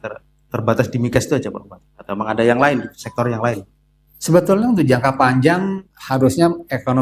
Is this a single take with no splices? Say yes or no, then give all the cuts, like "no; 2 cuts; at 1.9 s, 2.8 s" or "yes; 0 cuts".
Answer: yes; 0 cuts